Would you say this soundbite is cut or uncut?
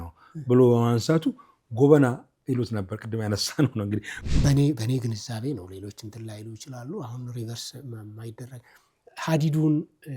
cut